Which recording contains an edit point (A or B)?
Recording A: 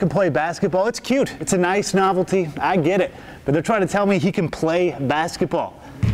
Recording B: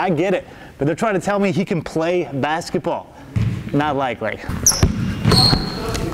B